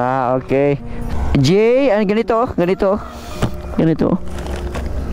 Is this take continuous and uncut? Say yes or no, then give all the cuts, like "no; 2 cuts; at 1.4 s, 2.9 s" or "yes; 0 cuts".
no; 1 cut; at 0.9 s